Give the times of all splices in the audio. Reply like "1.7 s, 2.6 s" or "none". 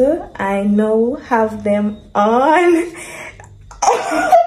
none